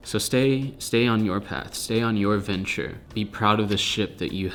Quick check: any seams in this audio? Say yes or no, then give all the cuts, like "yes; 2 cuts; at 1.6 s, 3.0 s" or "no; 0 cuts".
no; 0 cuts